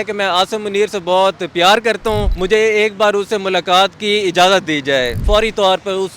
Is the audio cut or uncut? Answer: cut